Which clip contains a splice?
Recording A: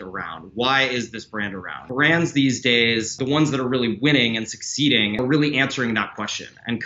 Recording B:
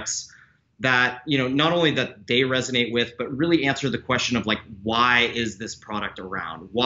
A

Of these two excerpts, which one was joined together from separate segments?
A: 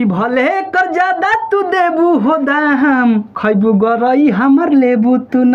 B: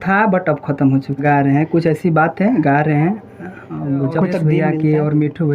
B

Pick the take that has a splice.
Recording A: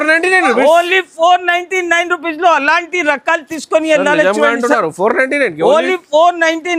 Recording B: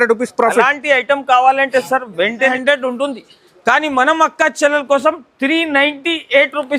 B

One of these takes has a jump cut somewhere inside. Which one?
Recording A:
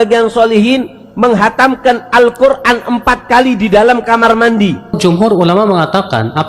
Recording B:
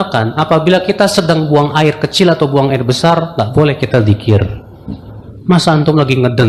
A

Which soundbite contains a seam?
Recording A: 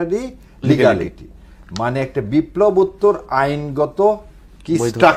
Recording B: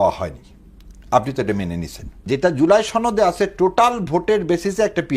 B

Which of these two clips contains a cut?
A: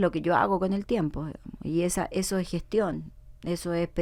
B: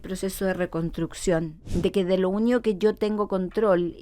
B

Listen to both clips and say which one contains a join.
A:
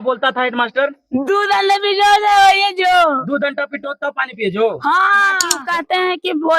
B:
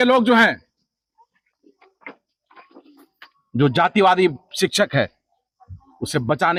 A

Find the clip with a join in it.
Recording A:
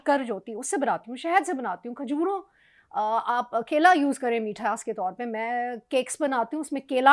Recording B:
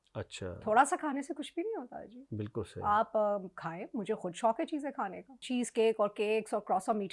B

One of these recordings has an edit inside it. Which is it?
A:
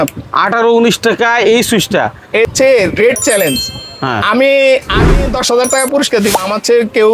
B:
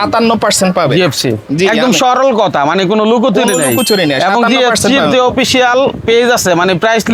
A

